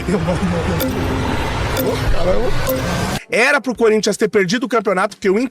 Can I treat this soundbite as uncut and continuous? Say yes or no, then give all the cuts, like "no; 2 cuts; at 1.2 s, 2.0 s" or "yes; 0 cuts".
no; 1 cut; at 3.1 s